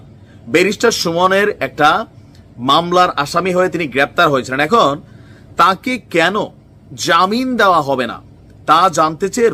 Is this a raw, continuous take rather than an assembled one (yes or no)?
yes